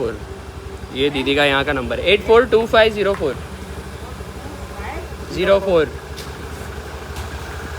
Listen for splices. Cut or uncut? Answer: uncut